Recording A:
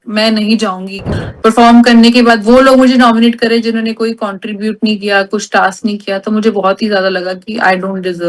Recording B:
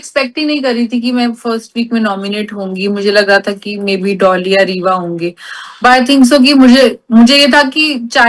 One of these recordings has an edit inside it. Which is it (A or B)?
A